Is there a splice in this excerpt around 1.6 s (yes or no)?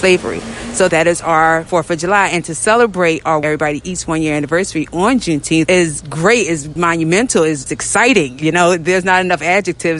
yes